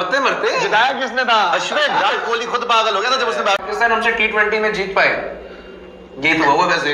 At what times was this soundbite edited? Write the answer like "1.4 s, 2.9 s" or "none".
2.0 s, 3.7 s